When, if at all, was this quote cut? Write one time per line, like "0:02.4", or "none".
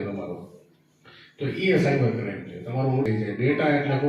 0:03.1